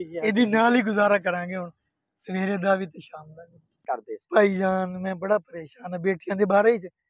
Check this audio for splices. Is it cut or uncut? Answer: cut